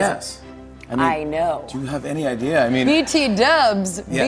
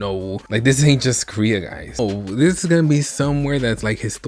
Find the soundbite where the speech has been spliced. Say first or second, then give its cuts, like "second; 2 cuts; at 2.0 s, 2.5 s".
second; 1 cut; at 2.0 s